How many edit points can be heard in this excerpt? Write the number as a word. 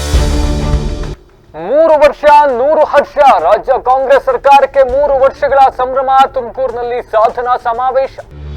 one